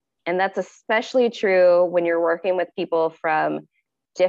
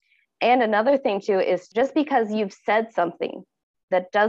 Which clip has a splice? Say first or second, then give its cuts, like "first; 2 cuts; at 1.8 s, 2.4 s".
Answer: second; 1 cut; at 1.7 s